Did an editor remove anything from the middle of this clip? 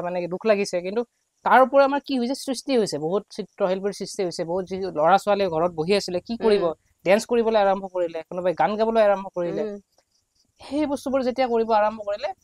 no; 0 cuts

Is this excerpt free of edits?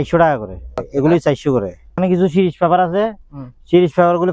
no; 2 cuts; at 0.8 s, 2.0 s

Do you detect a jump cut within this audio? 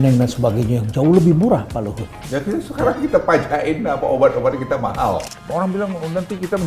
yes; 1 cut; at 5.3 s

